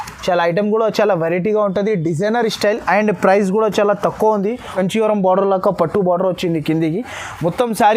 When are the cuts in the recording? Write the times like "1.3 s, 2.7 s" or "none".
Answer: 4.7 s